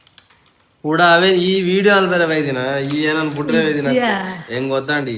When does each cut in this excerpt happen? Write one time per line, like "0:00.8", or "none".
none